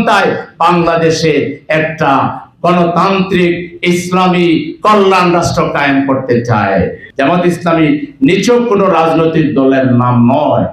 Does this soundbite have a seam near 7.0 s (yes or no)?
yes